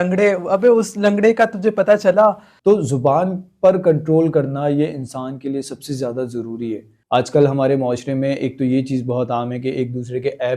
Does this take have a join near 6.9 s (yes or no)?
yes